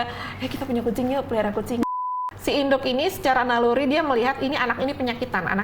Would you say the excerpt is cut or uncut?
cut